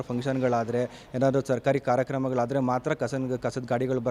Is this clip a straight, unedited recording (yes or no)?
yes